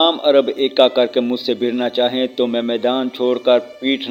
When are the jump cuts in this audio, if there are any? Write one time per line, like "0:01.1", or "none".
none